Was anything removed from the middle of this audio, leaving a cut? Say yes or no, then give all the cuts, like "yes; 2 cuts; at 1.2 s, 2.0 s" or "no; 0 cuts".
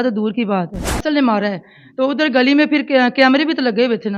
yes; 1 cut; at 1.0 s